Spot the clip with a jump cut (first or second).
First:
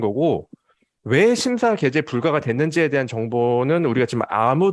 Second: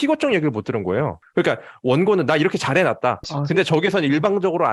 second